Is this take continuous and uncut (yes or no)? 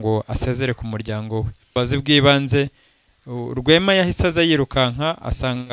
no